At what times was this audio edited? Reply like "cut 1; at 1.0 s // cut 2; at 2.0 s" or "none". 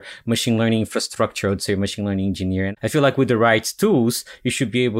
cut 1; at 2.7 s